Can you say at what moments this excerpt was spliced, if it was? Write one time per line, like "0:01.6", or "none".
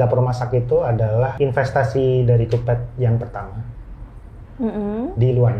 0:01.3